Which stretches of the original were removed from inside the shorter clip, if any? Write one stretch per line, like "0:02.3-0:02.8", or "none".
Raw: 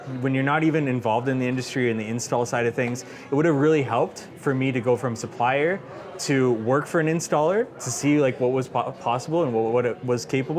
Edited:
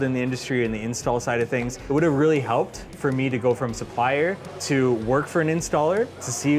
0:03.0-0:03.2
0:05.9-0:06.1